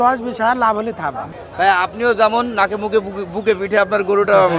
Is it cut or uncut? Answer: cut